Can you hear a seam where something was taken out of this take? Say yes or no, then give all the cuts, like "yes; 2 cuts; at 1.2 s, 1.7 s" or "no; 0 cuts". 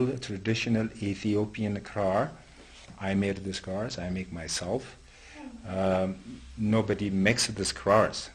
yes; 1 cut; at 6.5 s